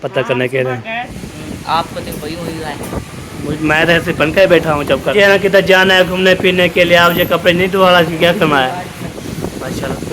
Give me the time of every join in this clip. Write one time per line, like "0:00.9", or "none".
0:01.1
0:05.1
0:09.2